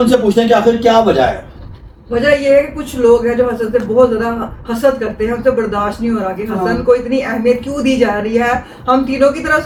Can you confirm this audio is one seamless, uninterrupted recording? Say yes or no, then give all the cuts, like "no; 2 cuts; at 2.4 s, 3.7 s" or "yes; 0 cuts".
yes; 0 cuts